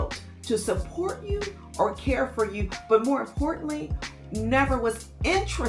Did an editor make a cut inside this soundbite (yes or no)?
no